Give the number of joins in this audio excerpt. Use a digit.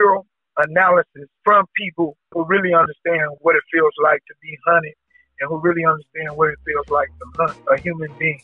3